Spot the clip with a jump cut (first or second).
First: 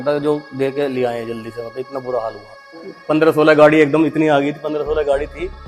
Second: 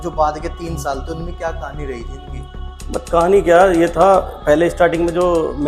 first